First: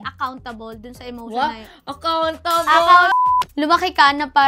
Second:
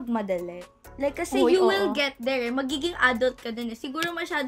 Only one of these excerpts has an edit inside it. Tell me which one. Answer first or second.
first